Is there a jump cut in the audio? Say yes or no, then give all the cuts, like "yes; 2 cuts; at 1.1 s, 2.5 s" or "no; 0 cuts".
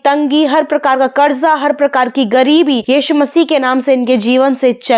no; 0 cuts